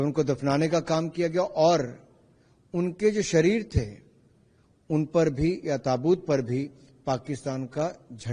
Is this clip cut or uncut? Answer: uncut